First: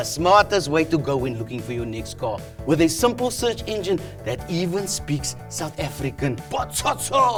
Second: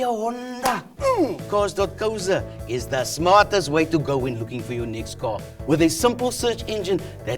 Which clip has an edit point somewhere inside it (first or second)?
second